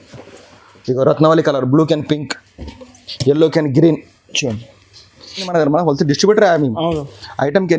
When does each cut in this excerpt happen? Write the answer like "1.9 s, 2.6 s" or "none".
5.5 s